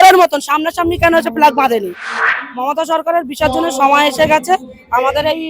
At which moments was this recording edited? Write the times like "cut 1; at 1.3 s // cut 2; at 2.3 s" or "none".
cut 1; at 2.4 s